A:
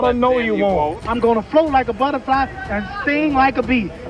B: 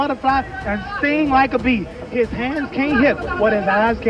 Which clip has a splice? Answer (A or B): A